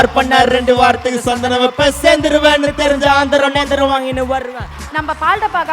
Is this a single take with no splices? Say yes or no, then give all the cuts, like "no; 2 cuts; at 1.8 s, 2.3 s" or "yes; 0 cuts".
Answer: no; 1 cut; at 4.7 s